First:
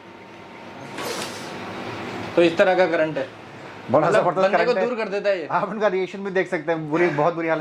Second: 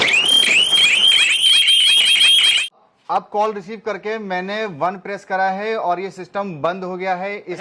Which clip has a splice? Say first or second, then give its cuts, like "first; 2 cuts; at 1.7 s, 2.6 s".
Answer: second; 1 cut; at 2.6 s